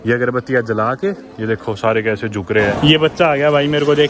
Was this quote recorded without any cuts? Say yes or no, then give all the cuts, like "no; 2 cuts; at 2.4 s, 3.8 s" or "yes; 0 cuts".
no; 1 cut; at 2.8 s